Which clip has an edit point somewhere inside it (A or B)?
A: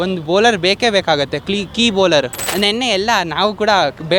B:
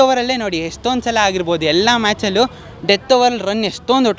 A